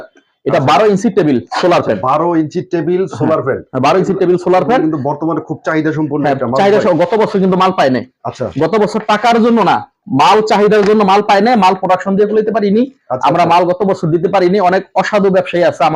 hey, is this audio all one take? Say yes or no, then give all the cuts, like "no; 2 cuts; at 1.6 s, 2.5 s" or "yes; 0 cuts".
yes; 0 cuts